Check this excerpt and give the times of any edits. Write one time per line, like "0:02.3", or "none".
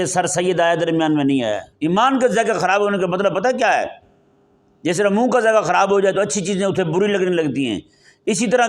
0:01.7